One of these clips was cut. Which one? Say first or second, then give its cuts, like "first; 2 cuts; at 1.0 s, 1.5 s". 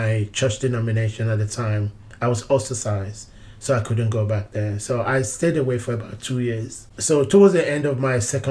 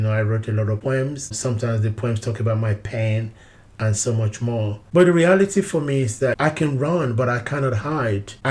second; 3 cuts; at 1.0 s, 4.8 s, 6.4 s